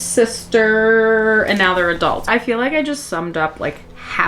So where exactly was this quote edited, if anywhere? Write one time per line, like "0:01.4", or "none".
0:02.2